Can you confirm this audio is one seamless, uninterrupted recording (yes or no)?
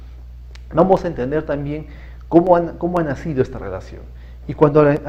yes